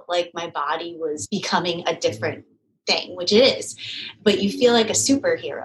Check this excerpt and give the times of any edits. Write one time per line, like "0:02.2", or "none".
0:01.2